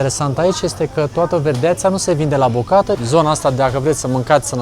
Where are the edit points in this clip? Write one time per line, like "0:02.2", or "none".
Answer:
0:03.0